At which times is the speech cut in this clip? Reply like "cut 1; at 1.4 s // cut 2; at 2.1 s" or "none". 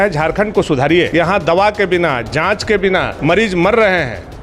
cut 1; at 1.1 s // cut 2; at 3.1 s